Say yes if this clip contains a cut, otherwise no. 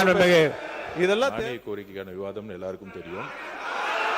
yes